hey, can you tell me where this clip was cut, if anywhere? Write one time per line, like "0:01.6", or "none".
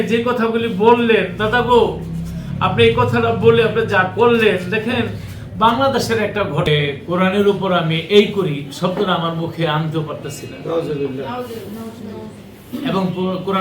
0:06.7